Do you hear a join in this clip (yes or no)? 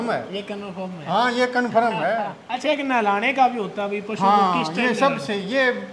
yes